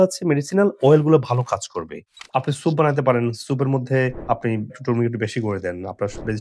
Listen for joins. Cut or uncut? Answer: cut